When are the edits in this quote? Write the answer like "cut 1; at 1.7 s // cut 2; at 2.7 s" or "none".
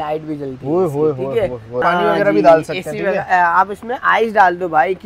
cut 1; at 1.8 s